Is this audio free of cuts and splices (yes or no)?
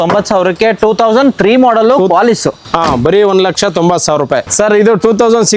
yes